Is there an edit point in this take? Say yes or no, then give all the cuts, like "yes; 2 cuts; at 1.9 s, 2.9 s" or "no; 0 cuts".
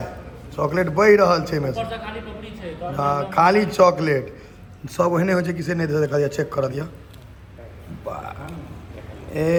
no; 0 cuts